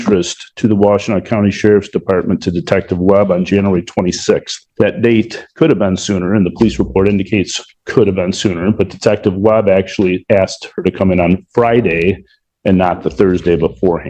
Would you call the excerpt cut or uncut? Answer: uncut